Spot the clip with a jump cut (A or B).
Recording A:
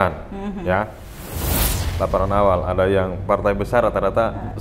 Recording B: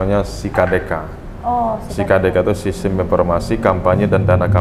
A